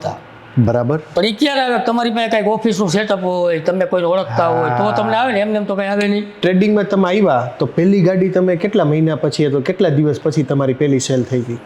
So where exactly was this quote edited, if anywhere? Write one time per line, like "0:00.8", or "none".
0:01.1
0:06.3